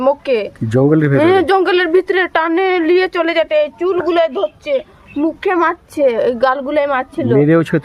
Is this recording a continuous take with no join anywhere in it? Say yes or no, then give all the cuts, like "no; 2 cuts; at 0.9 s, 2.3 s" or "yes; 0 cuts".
yes; 0 cuts